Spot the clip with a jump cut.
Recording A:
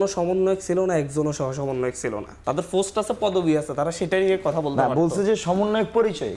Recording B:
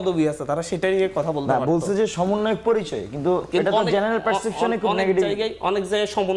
A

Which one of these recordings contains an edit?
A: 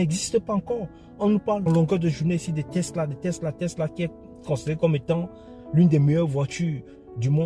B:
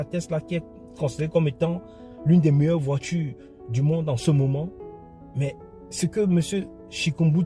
A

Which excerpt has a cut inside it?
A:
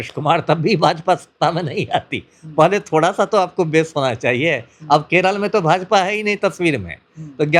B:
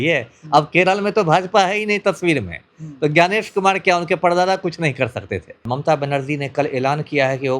B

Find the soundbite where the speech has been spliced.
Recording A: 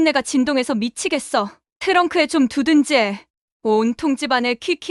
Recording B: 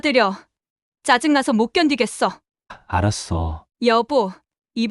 B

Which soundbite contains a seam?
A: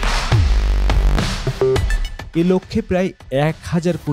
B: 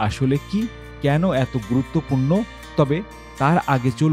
A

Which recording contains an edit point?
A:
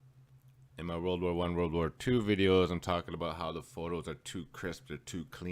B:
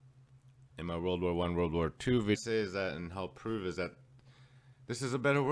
A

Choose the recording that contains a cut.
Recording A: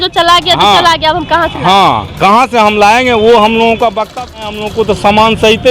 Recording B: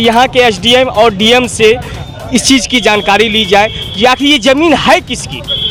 A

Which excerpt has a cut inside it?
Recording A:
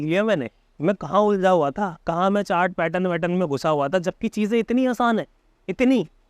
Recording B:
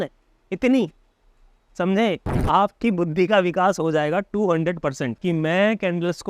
B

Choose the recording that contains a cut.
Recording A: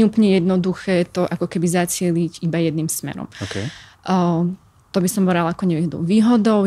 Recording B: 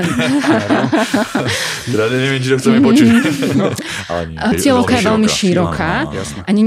B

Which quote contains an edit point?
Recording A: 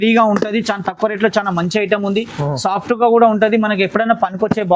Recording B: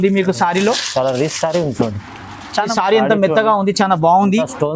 B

